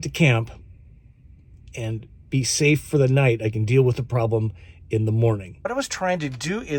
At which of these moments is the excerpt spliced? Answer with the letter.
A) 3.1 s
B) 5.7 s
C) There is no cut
B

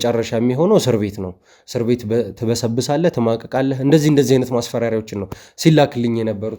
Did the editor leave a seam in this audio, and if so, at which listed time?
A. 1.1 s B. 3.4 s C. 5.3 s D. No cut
D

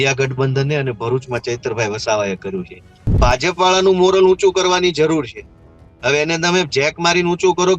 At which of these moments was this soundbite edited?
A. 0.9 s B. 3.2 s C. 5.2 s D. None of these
B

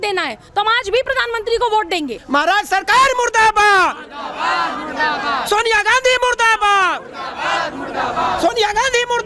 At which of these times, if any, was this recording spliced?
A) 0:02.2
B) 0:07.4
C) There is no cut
A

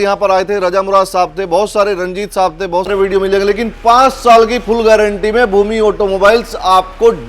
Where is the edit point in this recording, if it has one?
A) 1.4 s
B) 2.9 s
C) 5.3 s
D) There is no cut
B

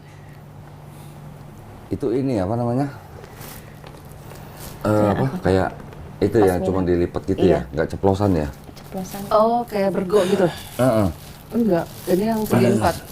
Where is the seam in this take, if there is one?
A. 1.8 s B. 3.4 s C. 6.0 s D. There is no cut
A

